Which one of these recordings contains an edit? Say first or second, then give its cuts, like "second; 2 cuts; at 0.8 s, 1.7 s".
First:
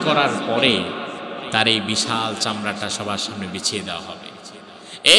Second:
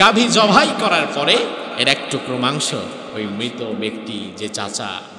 second; 2 cuts; at 1.7 s, 3.0 s